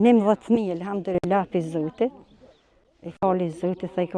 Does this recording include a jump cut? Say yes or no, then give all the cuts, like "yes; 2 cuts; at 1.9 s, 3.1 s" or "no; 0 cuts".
no; 0 cuts